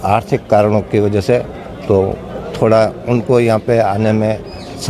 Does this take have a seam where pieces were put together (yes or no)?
no